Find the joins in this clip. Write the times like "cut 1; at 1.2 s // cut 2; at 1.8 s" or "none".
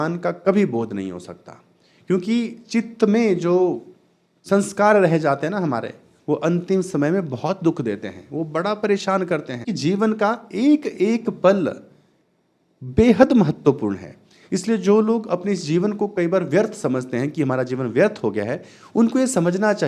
cut 1; at 9.7 s